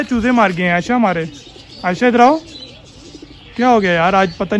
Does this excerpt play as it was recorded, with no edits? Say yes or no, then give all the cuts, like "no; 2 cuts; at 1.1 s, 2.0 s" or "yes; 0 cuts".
yes; 0 cuts